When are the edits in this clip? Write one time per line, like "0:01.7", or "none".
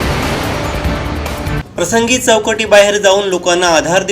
0:01.6